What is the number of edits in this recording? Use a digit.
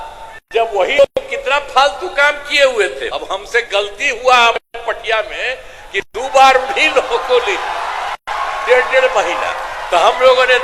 1